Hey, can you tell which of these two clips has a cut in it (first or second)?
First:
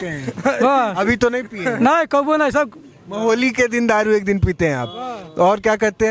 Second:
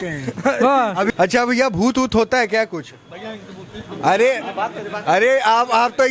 second